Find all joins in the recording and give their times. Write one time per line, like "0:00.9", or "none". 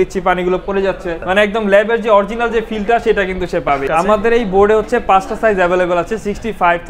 0:01.2
0:03.8